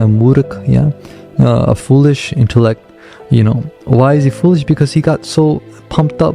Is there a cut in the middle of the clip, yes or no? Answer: no